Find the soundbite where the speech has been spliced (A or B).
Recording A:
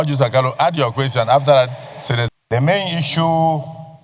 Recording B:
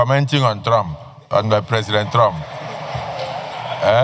A